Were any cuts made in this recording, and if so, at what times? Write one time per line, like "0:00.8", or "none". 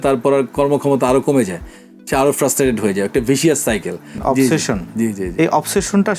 0:04.1